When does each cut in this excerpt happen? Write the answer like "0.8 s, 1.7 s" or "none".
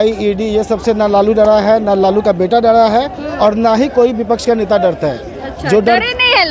none